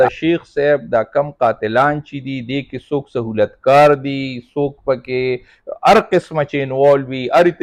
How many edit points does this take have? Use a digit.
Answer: 0